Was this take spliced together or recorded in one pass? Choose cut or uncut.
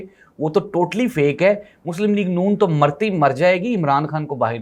uncut